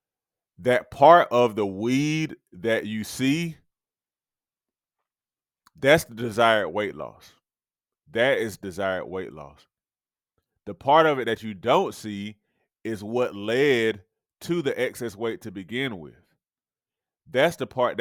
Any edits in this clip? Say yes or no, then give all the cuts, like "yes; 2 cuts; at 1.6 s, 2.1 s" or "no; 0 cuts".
no; 0 cuts